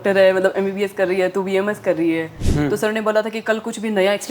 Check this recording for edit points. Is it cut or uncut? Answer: cut